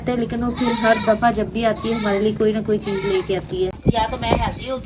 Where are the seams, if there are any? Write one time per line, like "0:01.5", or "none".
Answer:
0:03.8